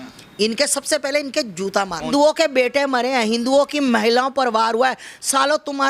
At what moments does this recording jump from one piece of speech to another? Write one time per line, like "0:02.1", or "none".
0:02.1

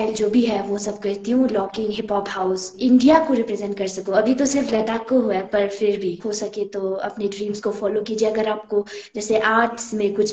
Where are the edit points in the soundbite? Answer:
0:02.7
0:06.2

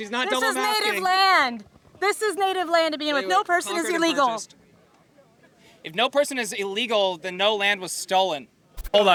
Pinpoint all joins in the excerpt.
none

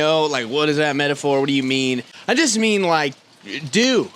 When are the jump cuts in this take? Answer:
0:02.1

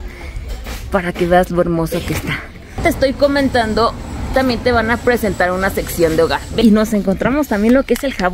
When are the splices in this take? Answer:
0:02.8
0:06.6

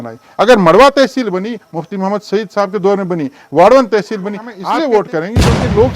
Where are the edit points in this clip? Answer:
0:04.5

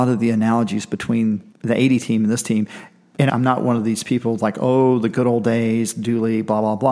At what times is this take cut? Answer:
0:01.5
0:03.3

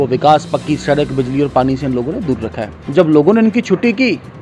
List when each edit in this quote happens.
0:02.7

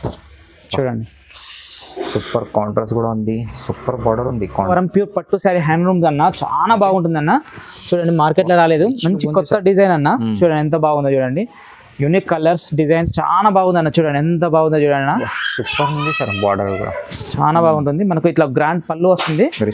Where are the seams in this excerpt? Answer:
0:04.7

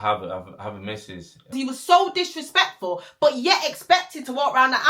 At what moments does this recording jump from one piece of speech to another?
0:01.5

